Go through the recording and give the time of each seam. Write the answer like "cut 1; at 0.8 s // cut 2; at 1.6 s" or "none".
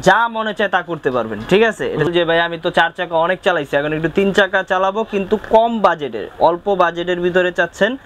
cut 1; at 2.1 s